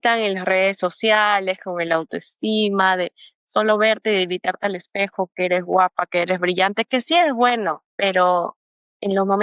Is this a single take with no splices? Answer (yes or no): no